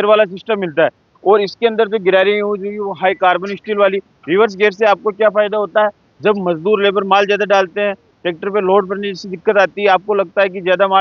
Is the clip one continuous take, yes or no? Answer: yes